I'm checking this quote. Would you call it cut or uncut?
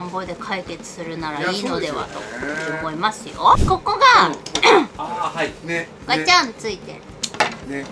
cut